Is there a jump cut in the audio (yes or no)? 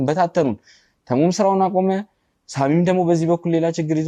no